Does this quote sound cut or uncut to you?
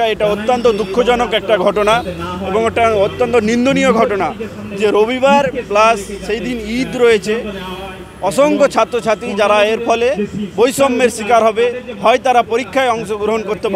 uncut